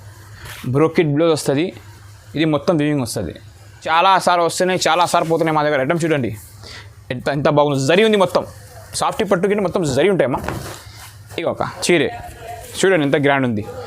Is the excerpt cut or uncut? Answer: cut